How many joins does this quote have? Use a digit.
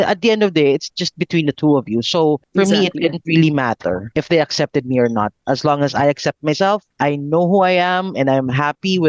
3